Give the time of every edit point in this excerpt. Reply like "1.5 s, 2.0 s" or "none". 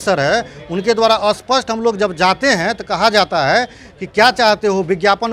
none

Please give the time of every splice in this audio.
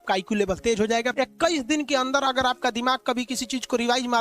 1.1 s

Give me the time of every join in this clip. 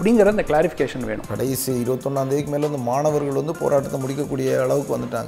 1.3 s

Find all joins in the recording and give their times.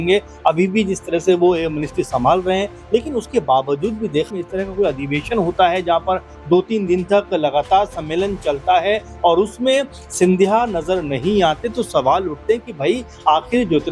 4.3 s

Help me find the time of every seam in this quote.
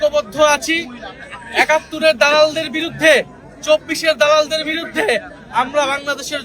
none

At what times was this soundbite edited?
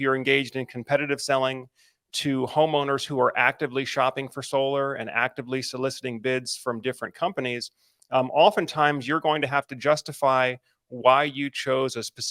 none

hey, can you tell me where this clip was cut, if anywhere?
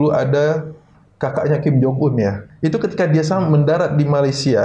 2.4 s

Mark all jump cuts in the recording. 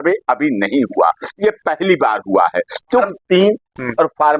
3.0 s

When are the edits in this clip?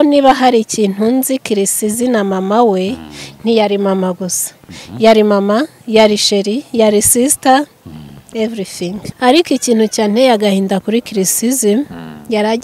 9.0 s

